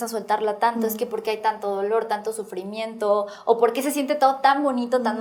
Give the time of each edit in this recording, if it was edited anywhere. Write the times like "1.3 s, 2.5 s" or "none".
none